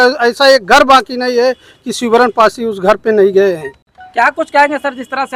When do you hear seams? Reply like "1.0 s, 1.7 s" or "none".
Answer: none